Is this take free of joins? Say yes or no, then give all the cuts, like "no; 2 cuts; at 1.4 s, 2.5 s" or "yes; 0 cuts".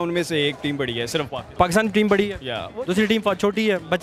no; 1 cut; at 1.4 s